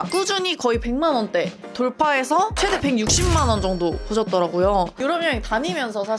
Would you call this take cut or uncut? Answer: cut